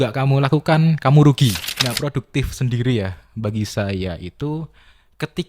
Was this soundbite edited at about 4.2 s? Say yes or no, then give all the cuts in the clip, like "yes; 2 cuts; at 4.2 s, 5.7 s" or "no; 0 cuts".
no; 1 cut; at 1.7 s